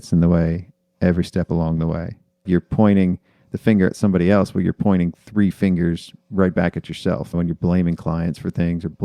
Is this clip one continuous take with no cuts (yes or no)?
no